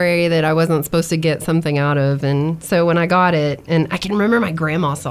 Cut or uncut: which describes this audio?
uncut